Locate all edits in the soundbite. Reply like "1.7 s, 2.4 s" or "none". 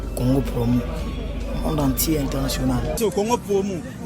3.0 s